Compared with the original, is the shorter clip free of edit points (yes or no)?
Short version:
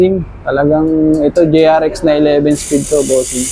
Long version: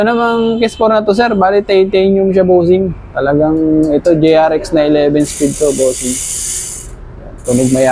yes